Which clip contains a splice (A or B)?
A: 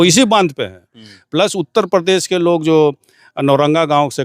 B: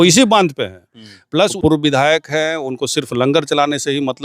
B